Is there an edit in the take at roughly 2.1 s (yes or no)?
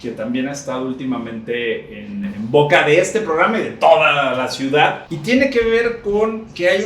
no